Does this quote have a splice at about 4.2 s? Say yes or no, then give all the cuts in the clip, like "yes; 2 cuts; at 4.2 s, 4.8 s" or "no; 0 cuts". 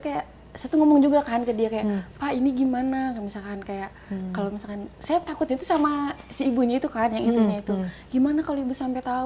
no; 0 cuts